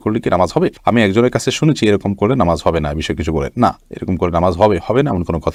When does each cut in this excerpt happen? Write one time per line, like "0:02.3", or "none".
none